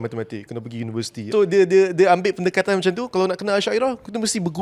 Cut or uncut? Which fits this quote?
cut